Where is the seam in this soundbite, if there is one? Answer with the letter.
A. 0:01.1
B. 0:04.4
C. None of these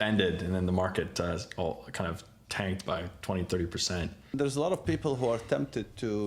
B